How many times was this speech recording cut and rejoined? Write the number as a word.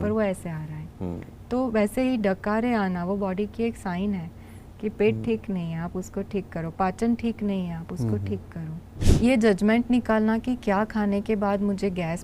one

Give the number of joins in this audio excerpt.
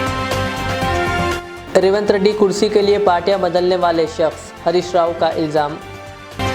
one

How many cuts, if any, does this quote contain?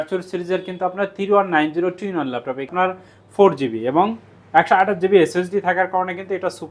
one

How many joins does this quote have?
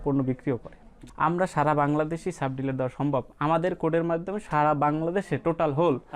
one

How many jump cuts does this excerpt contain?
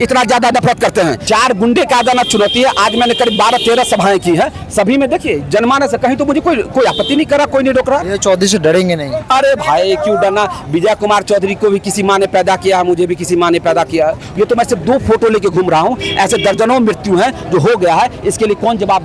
three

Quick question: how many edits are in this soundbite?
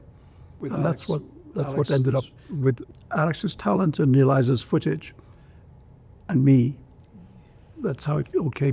one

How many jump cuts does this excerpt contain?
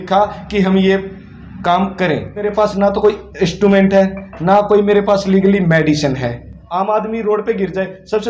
two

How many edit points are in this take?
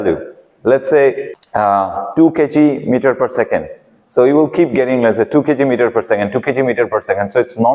one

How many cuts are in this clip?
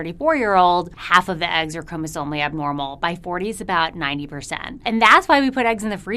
two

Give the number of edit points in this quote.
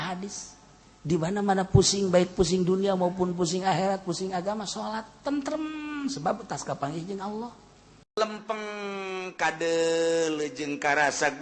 one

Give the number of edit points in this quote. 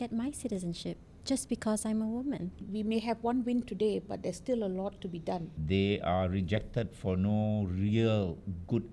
two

